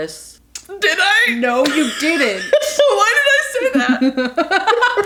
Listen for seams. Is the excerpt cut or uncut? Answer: uncut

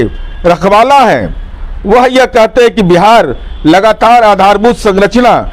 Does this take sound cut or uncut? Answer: uncut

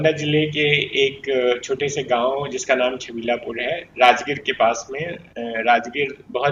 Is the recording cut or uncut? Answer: uncut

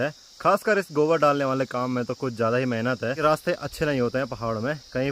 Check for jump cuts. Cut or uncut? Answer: cut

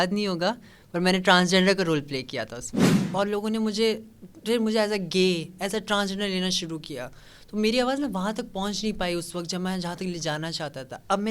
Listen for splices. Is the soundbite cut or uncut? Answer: cut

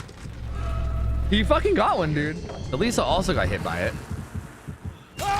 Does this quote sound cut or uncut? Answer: cut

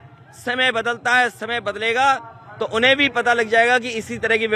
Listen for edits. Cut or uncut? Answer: uncut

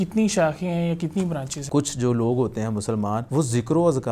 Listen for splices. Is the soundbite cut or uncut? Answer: cut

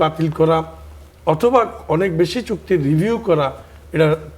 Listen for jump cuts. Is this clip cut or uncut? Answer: uncut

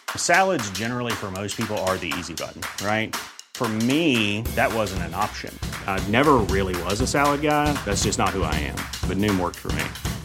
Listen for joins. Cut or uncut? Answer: uncut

